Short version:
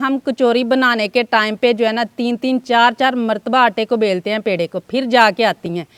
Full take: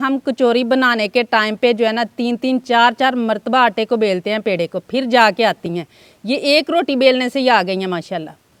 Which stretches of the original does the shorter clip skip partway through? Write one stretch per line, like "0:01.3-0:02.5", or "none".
none